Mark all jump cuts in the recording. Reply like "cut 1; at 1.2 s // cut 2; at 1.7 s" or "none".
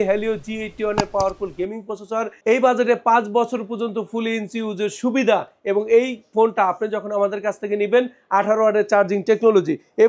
none